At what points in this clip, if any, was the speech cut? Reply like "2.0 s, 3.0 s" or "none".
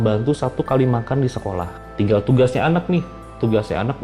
1.8 s